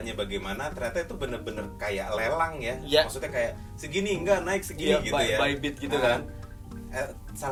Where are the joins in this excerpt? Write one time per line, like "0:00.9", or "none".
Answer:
none